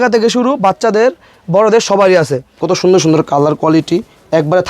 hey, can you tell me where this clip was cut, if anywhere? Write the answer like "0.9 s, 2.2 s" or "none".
2.5 s